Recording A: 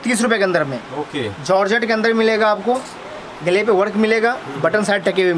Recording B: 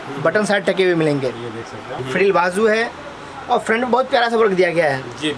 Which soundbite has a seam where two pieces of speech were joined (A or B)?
B